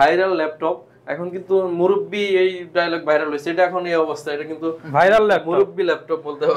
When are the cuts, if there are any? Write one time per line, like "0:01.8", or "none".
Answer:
none